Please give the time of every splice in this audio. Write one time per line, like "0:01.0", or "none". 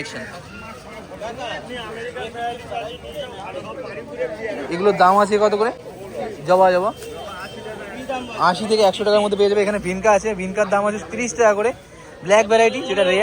none